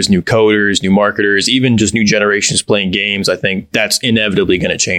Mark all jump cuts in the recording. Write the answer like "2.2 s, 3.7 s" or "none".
none